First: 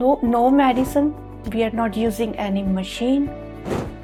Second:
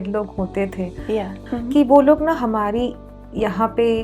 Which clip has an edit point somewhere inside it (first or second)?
second